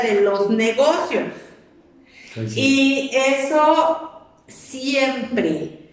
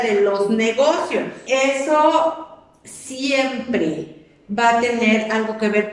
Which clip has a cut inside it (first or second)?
second